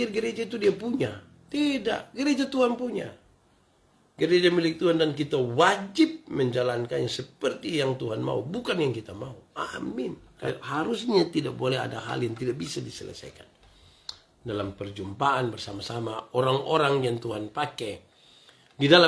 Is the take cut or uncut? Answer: cut